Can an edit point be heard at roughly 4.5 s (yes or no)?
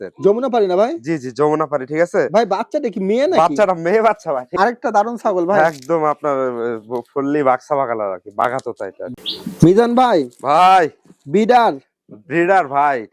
yes